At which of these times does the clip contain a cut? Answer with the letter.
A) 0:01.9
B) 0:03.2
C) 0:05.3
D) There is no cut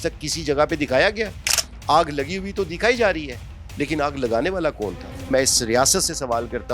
C